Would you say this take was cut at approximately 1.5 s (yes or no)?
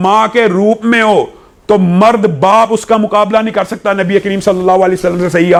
no